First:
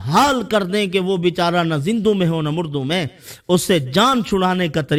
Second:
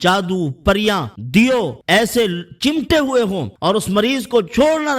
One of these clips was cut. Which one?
second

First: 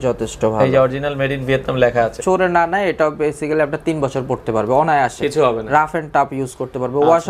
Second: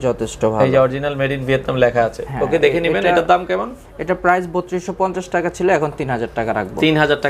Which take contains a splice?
first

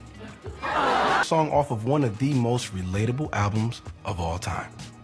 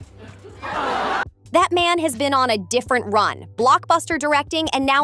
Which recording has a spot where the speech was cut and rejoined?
first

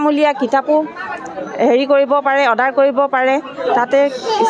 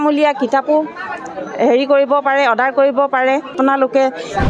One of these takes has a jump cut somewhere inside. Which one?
second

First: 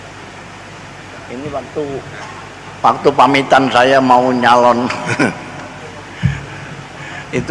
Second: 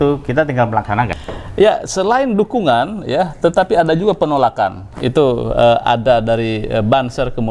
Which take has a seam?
second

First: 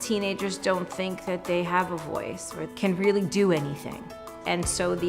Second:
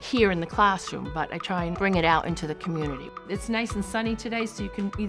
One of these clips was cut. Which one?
second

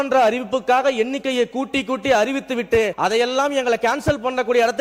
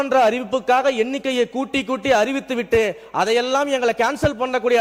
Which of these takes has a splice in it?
first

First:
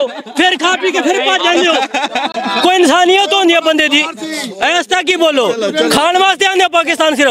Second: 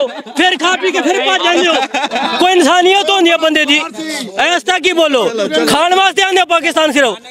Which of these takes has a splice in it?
second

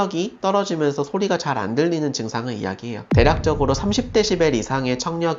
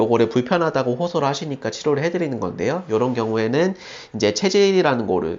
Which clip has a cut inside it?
first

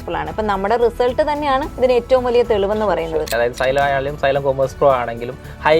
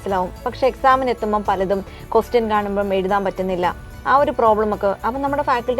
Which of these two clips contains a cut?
first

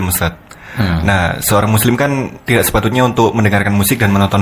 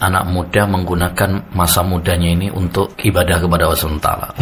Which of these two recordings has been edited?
second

